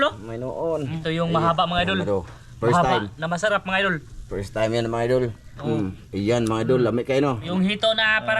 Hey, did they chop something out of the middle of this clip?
yes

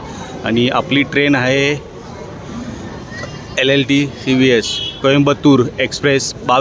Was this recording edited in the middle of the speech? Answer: no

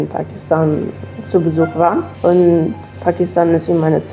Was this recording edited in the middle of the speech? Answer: yes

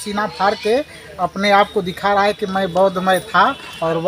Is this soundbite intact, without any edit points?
yes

